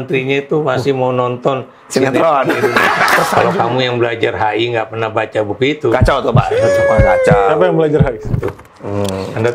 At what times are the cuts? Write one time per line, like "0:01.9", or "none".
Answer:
0:03.3
0:08.4